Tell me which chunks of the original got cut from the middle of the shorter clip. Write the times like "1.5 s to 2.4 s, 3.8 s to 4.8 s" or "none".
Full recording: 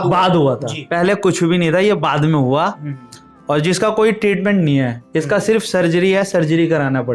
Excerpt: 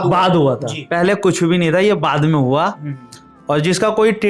none